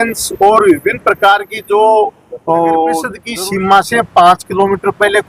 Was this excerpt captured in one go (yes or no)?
no